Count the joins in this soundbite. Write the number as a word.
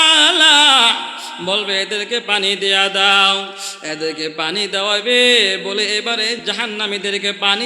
one